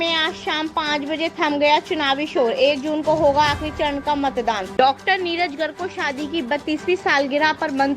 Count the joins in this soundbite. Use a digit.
1